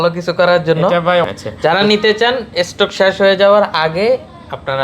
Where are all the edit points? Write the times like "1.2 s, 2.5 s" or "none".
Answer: 1.2 s